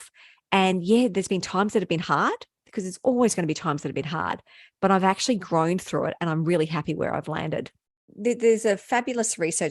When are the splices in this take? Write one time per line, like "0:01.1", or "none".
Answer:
0:08.1